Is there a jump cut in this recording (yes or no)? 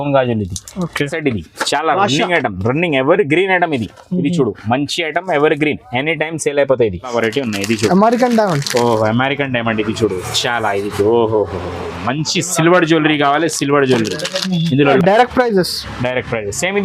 yes